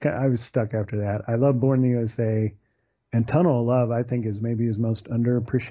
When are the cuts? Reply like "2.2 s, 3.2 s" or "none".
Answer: 2.9 s